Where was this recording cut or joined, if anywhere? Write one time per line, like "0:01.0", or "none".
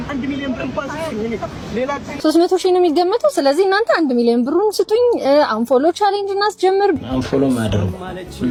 none